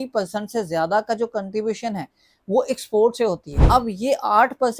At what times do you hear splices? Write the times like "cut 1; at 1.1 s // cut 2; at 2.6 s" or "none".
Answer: cut 1; at 3.5 s